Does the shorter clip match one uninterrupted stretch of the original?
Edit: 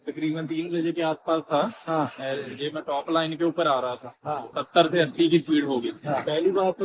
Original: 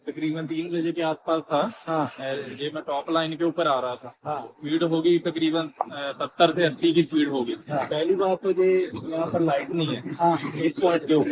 no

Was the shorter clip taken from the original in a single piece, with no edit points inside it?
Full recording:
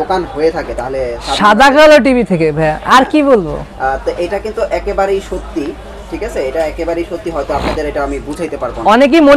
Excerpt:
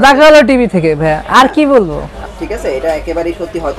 no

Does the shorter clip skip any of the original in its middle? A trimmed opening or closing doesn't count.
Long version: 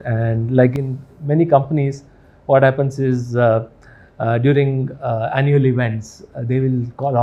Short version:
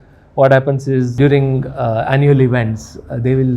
yes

